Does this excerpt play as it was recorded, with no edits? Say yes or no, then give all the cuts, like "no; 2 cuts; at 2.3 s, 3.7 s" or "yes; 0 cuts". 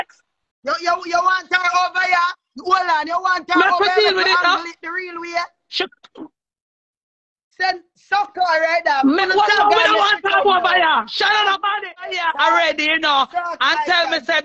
no; 1 cut; at 12.1 s